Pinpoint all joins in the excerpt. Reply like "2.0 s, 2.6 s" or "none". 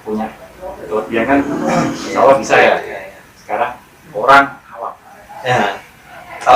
4.6 s